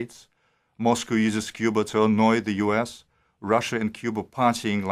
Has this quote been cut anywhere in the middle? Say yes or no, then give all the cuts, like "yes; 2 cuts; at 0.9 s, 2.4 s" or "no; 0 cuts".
no; 0 cuts